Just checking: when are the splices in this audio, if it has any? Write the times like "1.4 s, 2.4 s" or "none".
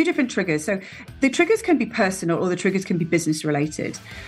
1.1 s